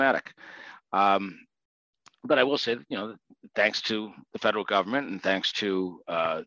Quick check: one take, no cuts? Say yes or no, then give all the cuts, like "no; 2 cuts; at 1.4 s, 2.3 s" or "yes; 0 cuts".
yes; 0 cuts